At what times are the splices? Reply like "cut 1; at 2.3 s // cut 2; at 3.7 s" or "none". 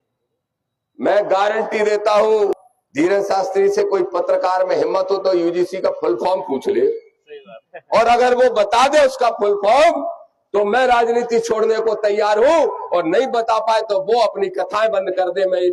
cut 1; at 2.6 s